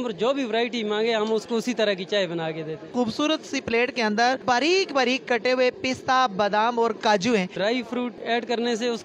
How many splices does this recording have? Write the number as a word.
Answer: three